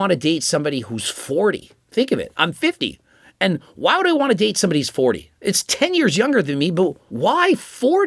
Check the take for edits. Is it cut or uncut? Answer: cut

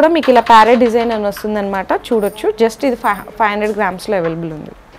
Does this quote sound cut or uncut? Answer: uncut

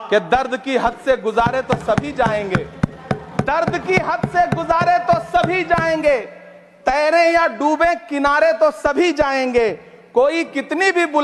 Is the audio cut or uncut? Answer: uncut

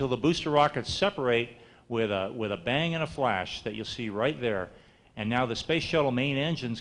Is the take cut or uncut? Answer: uncut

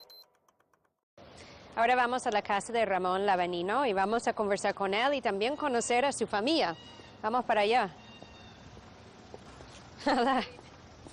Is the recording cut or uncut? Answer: uncut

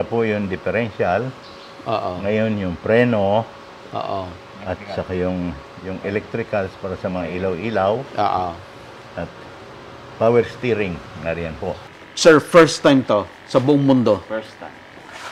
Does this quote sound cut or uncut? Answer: cut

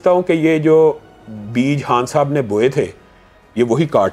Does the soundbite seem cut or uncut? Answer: uncut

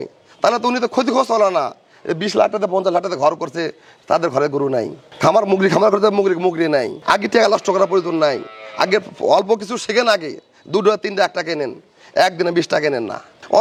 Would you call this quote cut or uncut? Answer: uncut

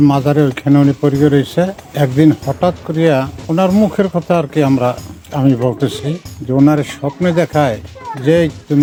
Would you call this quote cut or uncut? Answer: uncut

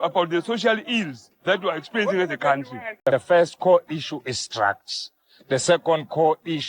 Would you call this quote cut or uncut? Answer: cut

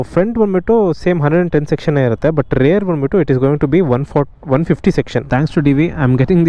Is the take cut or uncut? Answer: cut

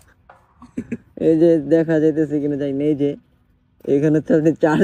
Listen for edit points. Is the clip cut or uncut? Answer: uncut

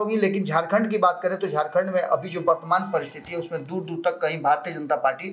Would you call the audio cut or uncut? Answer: uncut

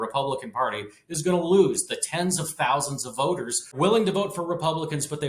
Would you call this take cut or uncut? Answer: cut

